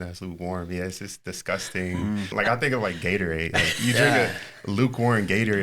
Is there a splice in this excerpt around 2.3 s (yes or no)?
yes